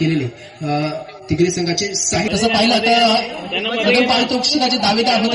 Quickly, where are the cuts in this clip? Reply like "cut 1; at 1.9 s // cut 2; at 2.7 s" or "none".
cut 1; at 2.3 s